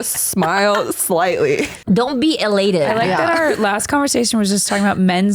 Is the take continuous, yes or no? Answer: no